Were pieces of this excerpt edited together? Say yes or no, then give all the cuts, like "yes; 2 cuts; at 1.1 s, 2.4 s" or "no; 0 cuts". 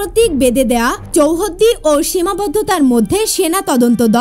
no; 0 cuts